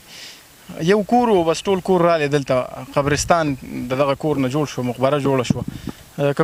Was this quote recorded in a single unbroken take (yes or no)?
yes